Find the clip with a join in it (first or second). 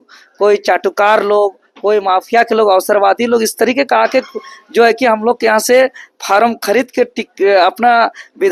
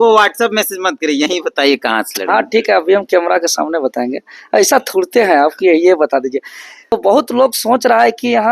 second